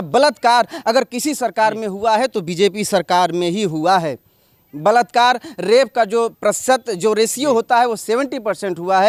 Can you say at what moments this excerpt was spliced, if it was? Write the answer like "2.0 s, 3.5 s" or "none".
none